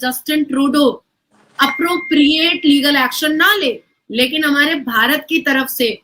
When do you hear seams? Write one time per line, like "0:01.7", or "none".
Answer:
none